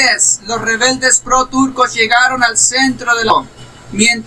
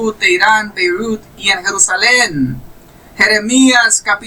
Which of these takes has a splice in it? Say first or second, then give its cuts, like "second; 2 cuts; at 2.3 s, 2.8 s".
first; 1 cut; at 3.3 s